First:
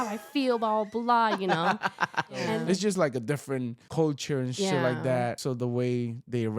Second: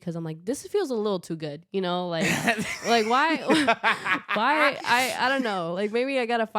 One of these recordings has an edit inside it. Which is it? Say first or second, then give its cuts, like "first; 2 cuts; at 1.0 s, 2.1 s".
first; 3 cuts; at 2.6 s, 3.8 s, 5.4 s